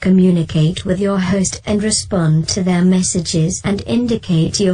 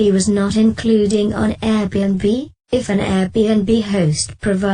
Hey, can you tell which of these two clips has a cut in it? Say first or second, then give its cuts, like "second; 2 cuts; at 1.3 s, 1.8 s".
second; 1 cut; at 2.6 s